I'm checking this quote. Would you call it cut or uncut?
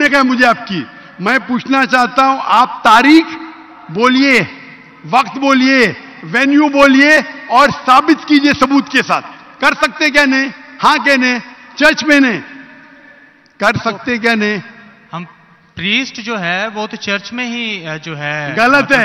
uncut